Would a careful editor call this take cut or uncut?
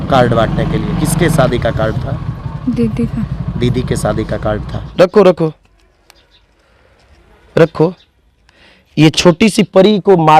cut